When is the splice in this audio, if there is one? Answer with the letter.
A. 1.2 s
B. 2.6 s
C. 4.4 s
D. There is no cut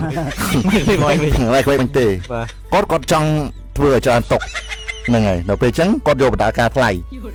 D